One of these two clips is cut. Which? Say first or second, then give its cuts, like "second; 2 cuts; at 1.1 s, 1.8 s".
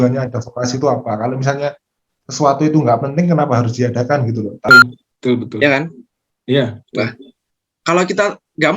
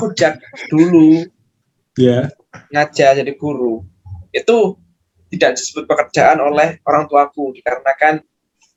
first; 1 cut; at 4.7 s